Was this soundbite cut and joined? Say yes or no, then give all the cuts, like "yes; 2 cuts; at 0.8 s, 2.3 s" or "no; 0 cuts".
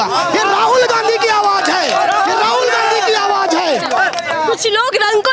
no; 0 cuts